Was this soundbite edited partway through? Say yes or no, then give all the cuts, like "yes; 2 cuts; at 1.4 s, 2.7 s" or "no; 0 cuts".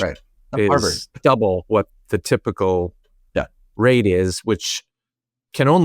no; 0 cuts